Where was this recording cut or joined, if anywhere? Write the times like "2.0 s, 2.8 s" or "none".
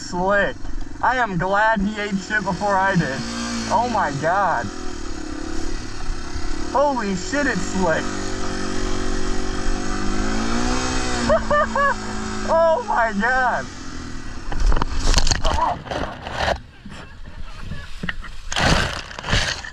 none